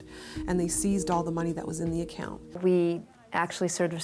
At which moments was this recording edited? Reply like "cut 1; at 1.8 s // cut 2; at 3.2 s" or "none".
cut 1; at 2.5 s